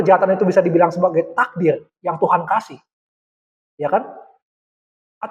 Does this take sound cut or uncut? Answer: uncut